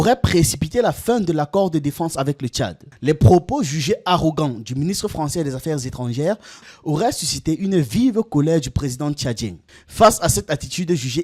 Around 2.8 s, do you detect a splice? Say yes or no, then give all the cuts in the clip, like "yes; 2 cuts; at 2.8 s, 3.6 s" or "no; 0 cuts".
yes; 3 cuts; at 2.8 s, 6.6 s, 9.6 s